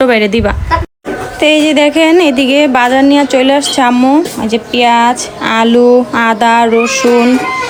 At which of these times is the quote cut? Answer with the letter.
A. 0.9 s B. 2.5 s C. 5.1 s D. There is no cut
D